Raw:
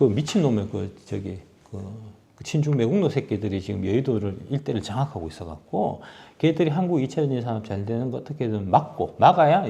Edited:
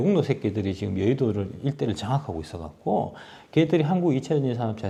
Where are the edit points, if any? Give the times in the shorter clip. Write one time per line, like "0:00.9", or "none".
none